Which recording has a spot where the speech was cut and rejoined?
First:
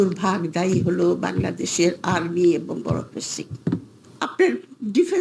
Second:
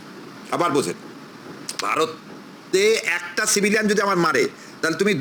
first; 1 cut; at 4.0 s

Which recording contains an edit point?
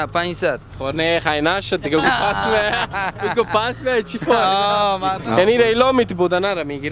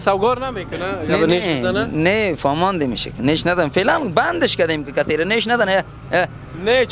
first; 1 cut; at 5.2 s

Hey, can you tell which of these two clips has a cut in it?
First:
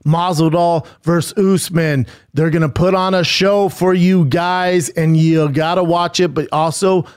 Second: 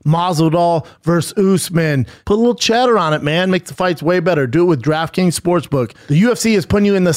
second; 1 cut; at 2.1 s

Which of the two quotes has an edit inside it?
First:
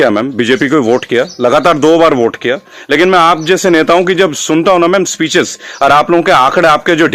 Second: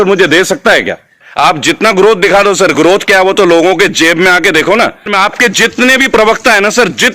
second; 2 cuts; at 1.2 s, 5.1 s

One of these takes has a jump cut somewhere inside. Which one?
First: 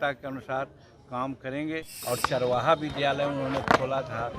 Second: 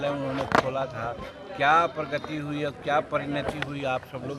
first; 1 cut; at 2.0 s

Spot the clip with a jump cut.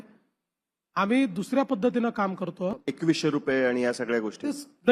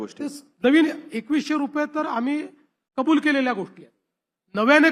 first; 1 cut; at 2.8 s

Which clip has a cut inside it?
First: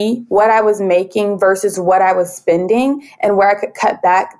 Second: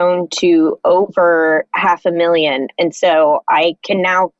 second; 1 cut; at 1.7 s

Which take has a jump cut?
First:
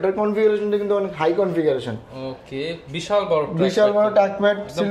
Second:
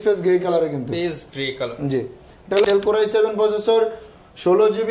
second; 1 cut; at 2.6 s

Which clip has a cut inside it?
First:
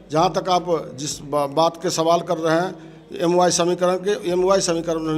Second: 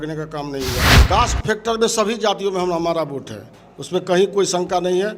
second; 1 cut; at 0.9 s

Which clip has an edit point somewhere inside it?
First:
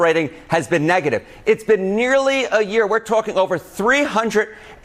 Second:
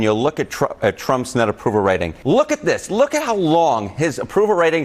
second; 1 cut; at 2.1 s

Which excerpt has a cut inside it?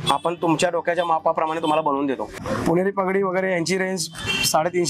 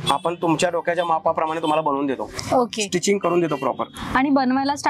first; 1 cut; at 2.4 s

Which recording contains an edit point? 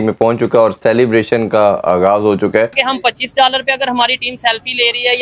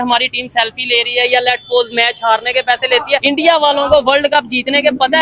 first; 1 cut; at 2.7 s

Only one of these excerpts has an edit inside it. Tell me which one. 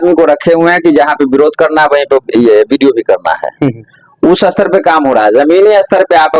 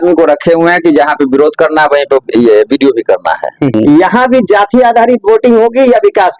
second; 1 cut; at 3.8 s

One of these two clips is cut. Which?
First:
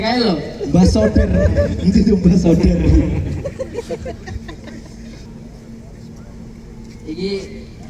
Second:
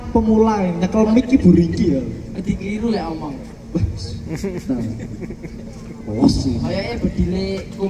first; 1 cut; at 5.2 s

